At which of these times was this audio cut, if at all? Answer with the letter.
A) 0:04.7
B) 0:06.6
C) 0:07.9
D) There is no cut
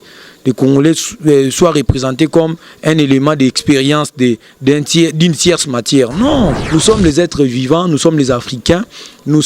B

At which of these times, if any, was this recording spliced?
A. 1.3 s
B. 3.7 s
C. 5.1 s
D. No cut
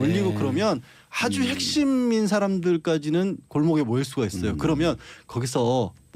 B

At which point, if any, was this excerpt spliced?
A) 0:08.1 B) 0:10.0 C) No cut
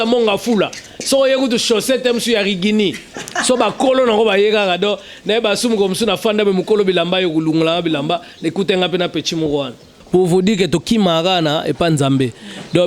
B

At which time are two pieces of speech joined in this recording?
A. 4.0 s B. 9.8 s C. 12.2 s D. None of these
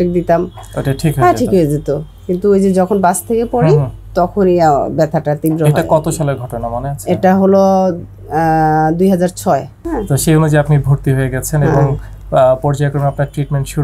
B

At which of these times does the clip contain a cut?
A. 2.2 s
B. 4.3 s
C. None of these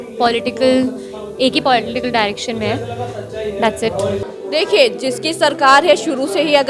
B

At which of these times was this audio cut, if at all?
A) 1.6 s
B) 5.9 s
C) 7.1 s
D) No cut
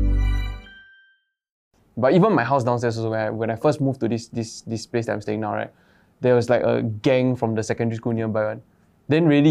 A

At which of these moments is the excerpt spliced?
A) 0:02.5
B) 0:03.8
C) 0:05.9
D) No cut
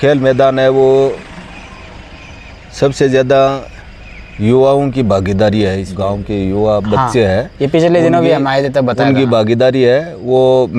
C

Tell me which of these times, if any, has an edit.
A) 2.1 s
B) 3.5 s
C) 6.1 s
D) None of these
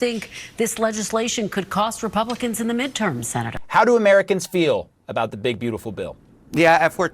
B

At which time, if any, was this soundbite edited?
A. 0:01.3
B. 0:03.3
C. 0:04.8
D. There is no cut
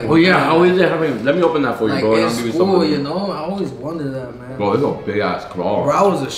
D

